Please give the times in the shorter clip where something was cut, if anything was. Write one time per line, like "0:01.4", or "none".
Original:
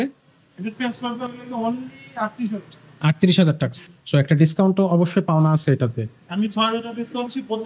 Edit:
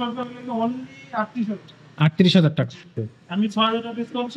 0:02.9